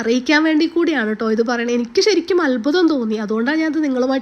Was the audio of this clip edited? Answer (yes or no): no